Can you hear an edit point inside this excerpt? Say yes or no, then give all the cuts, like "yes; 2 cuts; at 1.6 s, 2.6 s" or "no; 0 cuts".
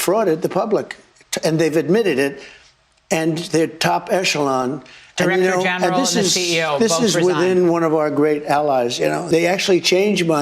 yes; 1 cut; at 9.2 s